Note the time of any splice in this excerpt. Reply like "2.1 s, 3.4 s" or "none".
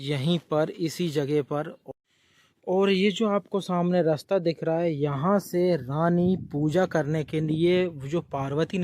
1.8 s

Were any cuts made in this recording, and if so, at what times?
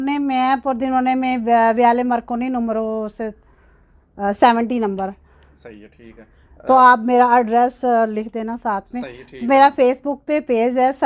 none

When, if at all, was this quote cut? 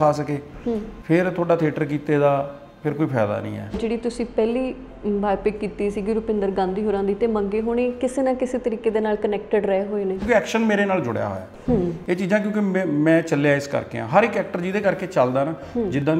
3.8 s, 10.2 s

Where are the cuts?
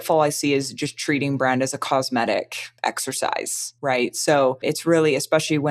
2.6 s, 3.6 s, 4.6 s

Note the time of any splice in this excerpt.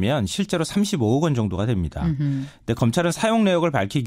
2.5 s

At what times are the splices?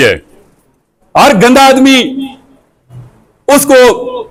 none

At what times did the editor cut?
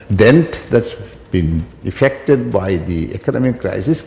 1.8 s

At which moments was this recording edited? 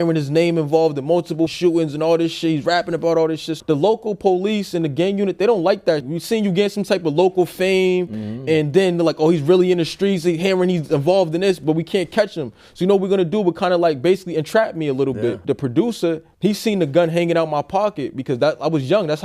1.5 s, 3.5 s, 6.1 s, 15.4 s, 16.3 s

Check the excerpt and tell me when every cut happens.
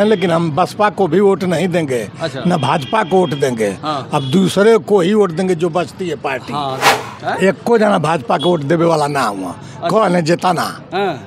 6.9 s

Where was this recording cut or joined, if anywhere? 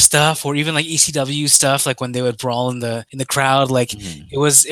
3.1 s

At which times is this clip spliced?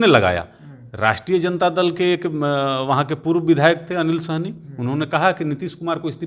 none

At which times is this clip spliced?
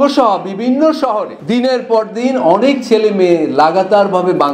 1.3 s

